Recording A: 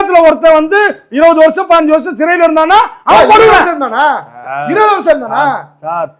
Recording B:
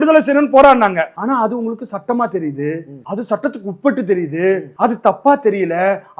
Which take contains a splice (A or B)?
B